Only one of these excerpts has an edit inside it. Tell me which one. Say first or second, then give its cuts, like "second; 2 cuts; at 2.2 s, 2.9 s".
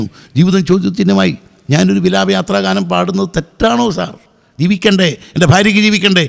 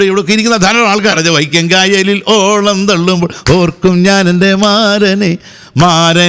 second; 1 cut; at 1.2 s